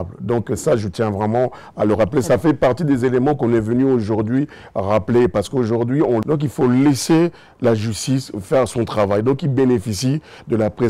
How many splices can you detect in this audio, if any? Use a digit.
1